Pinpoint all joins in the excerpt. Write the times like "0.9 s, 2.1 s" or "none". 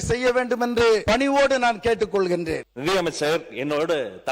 1.0 s, 2.7 s